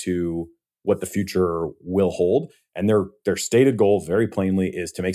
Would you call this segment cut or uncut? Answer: cut